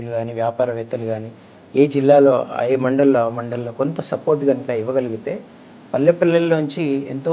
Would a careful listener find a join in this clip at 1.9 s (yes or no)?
no